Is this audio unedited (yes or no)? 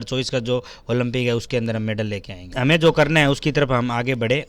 no